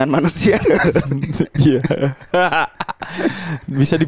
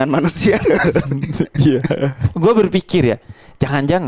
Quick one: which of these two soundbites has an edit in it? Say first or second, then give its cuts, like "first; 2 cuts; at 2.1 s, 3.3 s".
second; 1 cut; at 2.2 s